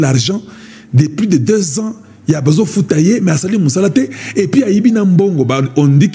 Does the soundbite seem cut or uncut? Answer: uncut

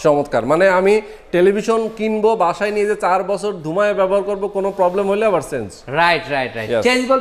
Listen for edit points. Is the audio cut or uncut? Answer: uncut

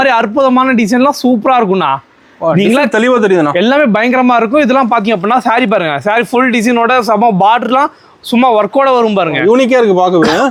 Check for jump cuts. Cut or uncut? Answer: uncut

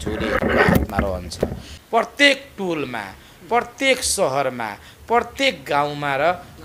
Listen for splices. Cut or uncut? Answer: cut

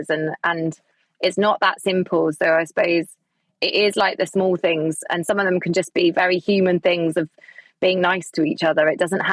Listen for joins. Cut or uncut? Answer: uncut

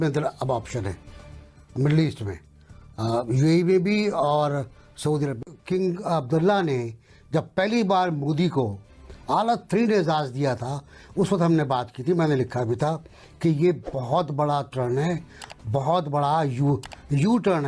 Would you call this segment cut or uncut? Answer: uncut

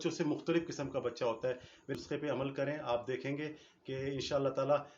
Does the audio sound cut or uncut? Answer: cut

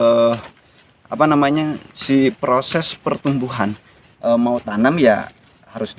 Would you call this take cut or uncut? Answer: cut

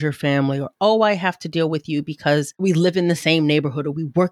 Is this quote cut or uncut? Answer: cut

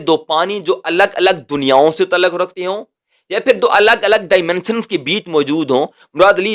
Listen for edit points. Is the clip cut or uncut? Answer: uncut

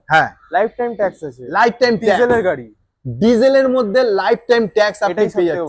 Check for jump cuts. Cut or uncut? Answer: uncut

